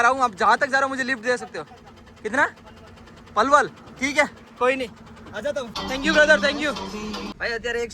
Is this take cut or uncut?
uncut